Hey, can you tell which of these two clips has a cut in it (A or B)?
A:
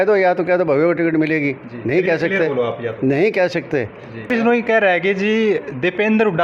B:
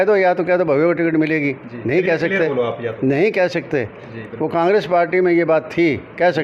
A